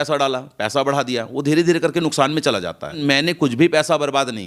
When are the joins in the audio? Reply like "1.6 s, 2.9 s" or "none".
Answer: 3.0 s